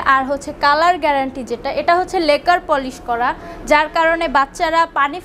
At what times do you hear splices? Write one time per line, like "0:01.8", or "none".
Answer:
none